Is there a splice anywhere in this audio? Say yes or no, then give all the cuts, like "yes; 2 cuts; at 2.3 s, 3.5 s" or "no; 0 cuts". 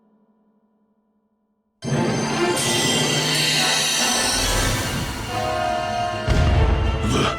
yes; 1 cut; at 1.6 s